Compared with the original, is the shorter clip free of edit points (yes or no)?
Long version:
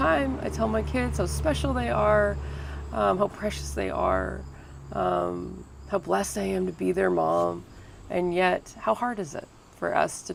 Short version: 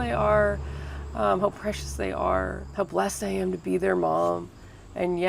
no